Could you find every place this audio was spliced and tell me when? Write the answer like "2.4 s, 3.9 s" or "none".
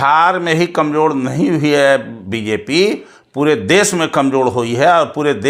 none